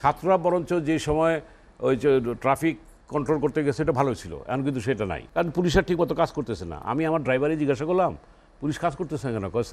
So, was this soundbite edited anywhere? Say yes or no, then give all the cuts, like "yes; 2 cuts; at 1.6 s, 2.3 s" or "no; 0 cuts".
yes; 1 cut; at 5.2 s